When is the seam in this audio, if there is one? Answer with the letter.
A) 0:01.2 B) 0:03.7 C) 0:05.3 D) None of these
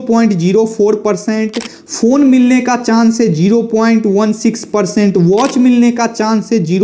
D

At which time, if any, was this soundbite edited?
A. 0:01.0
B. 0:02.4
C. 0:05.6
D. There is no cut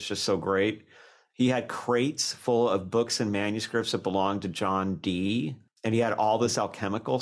C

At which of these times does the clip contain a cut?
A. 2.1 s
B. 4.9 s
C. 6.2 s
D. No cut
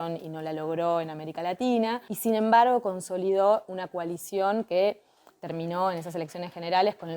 A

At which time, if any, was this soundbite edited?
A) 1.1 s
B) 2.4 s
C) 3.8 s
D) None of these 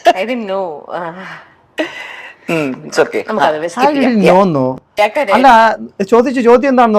D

